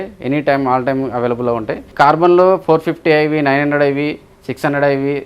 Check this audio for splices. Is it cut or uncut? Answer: cut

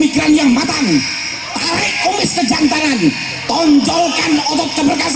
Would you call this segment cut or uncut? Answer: uncut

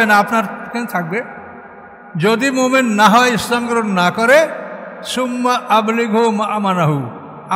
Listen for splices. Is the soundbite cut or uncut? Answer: uncut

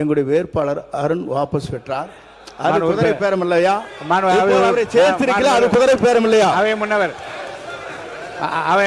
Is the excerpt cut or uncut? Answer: uncut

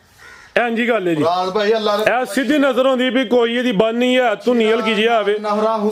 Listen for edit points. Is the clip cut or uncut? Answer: uncut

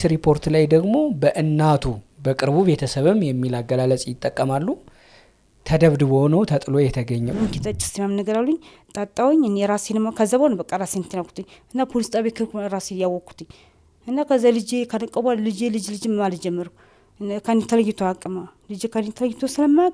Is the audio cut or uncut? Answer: cut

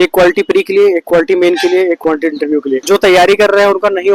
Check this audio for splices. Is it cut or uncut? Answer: cut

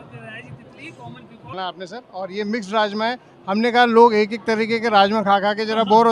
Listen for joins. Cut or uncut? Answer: cut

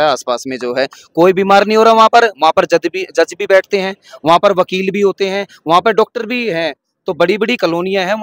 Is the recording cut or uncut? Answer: uncut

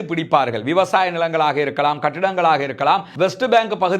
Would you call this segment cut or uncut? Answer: cut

